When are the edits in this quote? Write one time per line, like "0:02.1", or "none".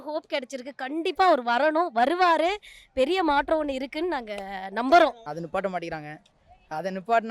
0:05.3